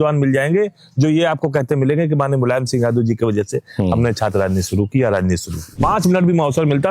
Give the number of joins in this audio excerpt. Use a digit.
1